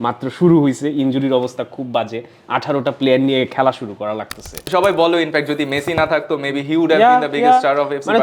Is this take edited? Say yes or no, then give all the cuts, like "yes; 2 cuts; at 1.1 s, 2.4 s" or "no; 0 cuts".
yes; 1 cut; at 4.6 s